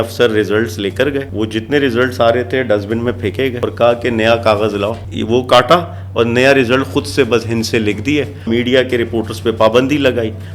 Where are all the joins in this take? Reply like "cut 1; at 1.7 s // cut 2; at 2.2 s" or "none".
cut 1; at 1.3 s // cut 2; at 3.6 s // cut 3; at 5.0 s // cut 4; at 8.5 s